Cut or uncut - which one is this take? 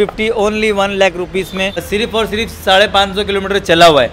cut